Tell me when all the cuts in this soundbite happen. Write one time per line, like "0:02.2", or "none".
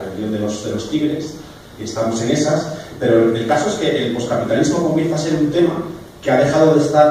0:01.2